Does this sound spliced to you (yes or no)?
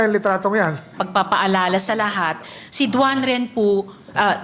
yes